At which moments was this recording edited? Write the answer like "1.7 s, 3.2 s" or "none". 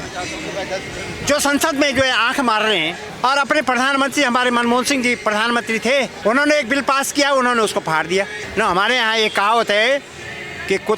3.0 s, 6.1 s, 8.4 s